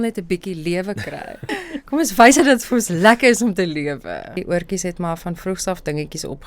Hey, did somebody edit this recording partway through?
yes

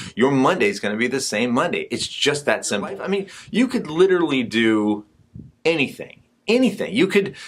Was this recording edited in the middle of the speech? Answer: yes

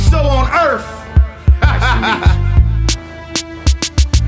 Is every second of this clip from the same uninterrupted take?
yes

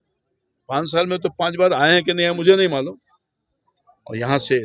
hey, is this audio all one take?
yes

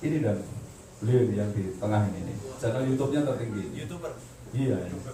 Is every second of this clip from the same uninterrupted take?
yes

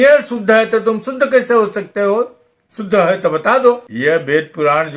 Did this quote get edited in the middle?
yes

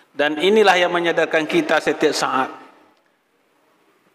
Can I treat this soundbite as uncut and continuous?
no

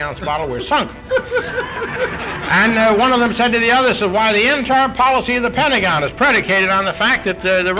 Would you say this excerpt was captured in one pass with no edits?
yes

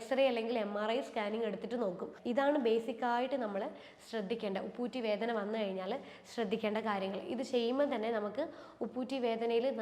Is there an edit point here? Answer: yes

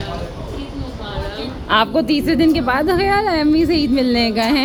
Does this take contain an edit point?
no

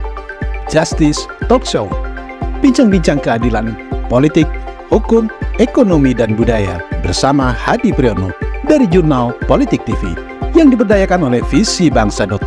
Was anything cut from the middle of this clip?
no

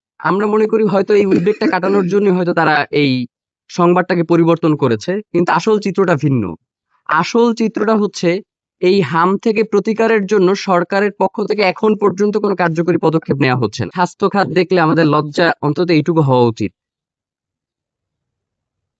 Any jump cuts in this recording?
yes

